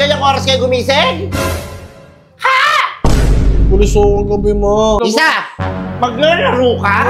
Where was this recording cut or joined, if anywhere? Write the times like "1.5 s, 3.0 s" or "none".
5.0 s